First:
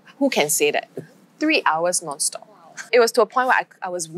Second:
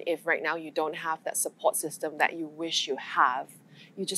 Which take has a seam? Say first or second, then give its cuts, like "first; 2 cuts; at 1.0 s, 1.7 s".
first; 1 cut; at 2.7 s